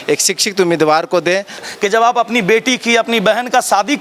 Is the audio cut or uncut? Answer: cut